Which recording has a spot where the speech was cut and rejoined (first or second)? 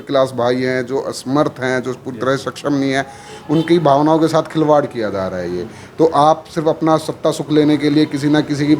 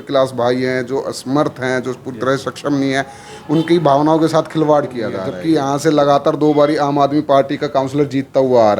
second